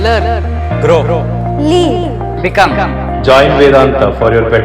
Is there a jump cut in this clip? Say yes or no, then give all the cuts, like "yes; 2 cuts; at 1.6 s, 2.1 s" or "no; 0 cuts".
no; 0 cuts